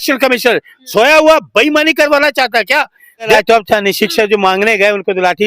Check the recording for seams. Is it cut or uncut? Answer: cut